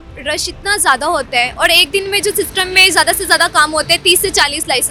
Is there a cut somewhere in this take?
no; 0 cuts

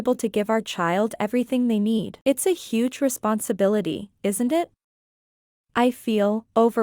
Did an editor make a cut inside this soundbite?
yes; 1 cut; at 2.1 s

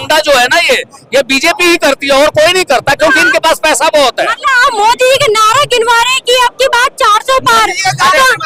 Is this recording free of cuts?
yes; 0 cuts

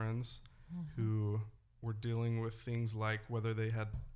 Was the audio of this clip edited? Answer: no; 0 cuts

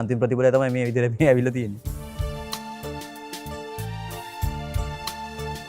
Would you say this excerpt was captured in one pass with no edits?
yes; 0 cuts

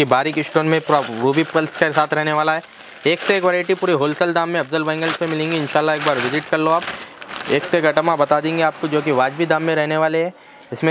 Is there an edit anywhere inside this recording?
no; 0 cuts

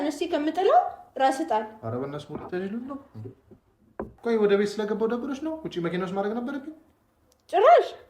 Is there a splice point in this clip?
yes; 1 cut; at 4.1 s

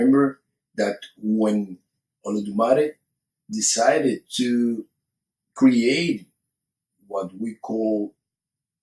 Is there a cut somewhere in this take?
yes; 1 cut; at 1.4 s

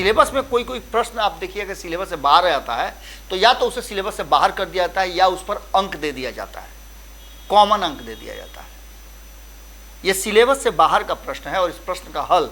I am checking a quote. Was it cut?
no; 0 cuts

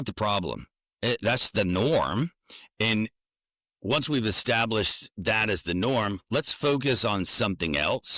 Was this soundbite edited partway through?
no; 0 cuts

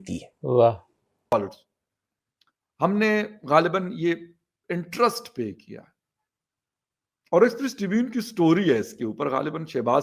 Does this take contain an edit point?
yes; 1 cut; at 1.3 s

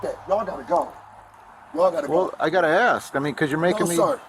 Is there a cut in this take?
no; 0 cuts

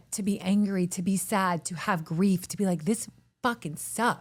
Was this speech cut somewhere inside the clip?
no; 0 cuts

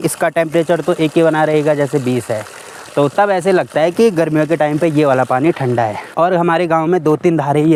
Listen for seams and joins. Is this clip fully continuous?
yes; 0 cuts

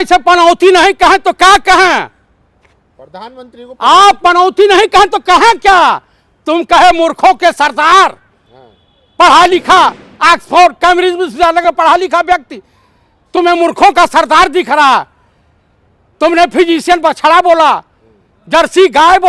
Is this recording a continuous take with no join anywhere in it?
yes; 0 cuts

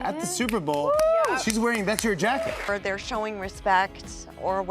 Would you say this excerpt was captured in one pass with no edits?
no; 1 cut; at 2.6 s

